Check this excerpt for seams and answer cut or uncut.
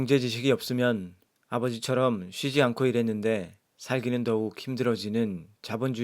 cut